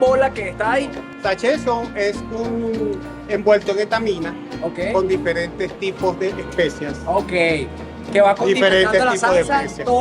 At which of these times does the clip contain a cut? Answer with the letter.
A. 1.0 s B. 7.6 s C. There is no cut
A